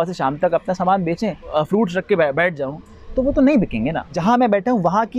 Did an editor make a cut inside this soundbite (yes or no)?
yes